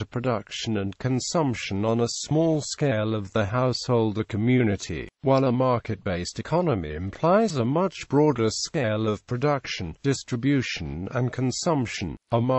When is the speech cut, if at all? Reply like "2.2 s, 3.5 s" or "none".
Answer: 8.6 s

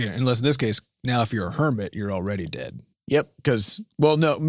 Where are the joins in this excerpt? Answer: 2.9 s

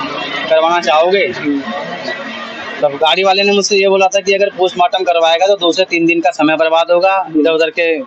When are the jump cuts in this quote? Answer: none

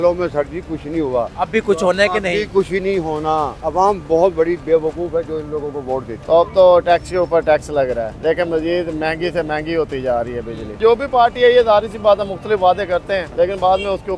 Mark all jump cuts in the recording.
1.3 s, 3.6 s, 6.1 s, 8.1 s, 10.8 s, 13.3 s

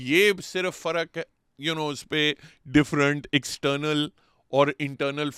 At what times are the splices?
none

